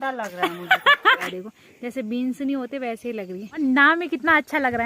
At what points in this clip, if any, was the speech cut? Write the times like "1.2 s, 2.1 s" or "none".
1.3 s, 3.6 s